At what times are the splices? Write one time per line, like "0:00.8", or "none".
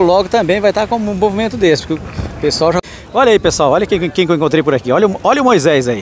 0:02.8